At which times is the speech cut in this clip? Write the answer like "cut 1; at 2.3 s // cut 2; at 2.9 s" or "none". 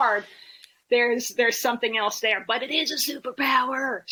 none